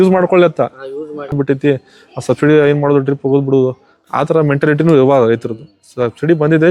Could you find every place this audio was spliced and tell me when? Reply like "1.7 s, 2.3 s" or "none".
1.3 s